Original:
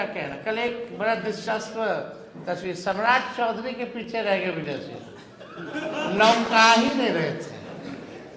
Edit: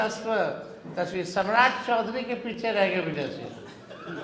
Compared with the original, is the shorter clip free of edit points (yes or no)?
yes